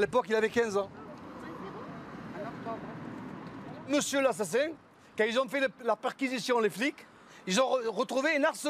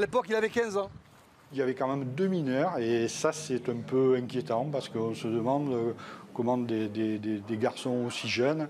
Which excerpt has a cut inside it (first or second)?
second